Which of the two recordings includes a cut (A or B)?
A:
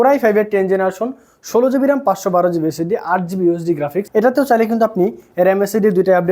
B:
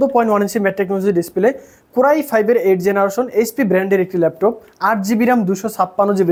A